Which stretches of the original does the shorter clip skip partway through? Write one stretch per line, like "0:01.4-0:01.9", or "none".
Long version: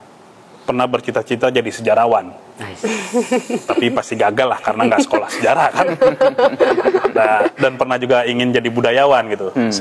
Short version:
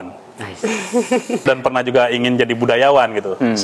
0:03.6-0:07.6